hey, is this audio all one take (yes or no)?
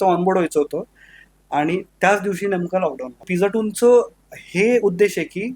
no